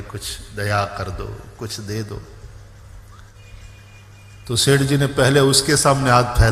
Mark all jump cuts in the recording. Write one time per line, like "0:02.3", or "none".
0:03.3